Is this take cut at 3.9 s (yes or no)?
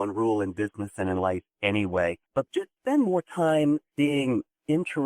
yes